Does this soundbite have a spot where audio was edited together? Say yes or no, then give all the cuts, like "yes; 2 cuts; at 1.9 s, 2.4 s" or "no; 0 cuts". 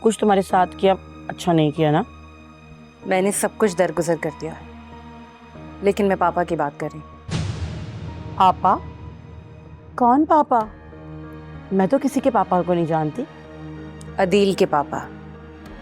no; 0 cuts